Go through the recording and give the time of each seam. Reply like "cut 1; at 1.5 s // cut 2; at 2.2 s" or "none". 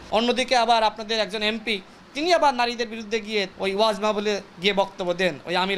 cut 1; at 3.5 s